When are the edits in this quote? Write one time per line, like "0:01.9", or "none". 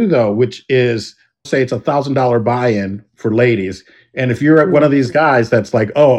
0:01.5